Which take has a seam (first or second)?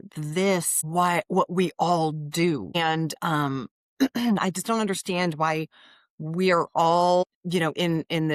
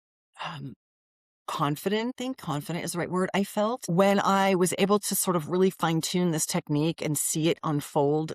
second